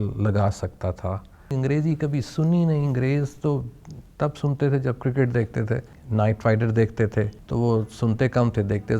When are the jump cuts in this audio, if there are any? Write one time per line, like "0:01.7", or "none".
0:01.5
0:05.9
0:07.4